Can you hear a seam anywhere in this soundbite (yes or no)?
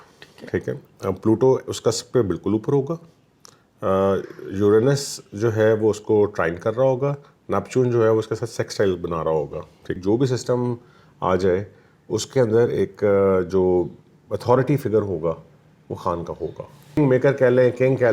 yes